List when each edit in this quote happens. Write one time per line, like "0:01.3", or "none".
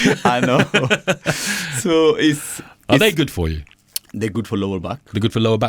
none